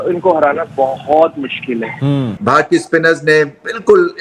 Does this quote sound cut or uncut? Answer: cut